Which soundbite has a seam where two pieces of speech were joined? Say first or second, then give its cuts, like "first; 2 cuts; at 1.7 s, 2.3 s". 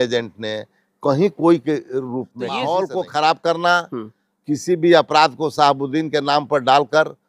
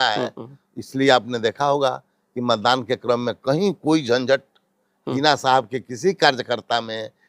first; 1 cut; at 2.4 s